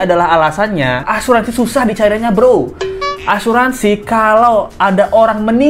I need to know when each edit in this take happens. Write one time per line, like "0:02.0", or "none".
0:01.1